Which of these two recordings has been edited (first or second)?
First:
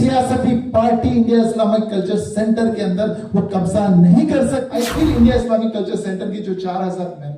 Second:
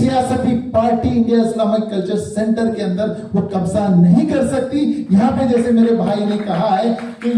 first